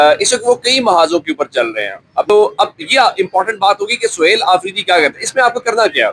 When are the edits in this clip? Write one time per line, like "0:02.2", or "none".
0:02.3